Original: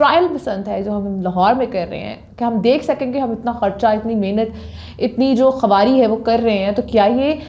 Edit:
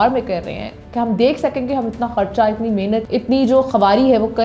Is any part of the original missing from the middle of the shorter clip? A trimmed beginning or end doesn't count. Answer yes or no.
yes